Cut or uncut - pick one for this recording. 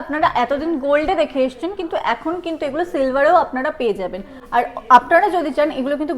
uncut